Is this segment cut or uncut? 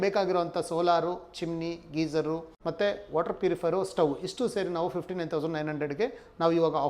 cut